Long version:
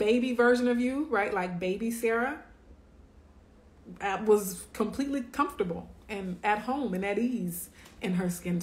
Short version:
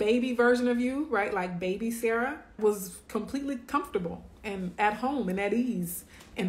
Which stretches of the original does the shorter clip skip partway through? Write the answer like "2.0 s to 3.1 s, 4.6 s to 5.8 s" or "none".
2.6 s to 4.2 s